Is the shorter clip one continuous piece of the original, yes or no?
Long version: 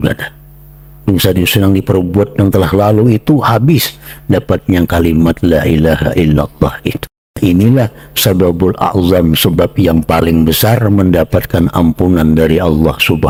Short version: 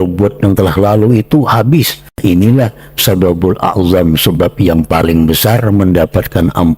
no